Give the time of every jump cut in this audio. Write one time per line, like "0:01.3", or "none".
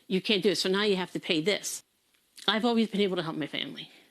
0:01.7